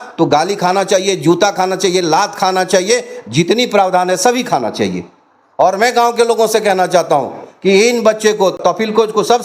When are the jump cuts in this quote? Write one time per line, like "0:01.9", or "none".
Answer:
0:08.5